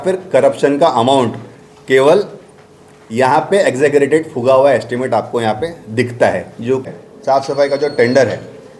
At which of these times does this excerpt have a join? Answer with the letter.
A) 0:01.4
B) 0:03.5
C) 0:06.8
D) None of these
C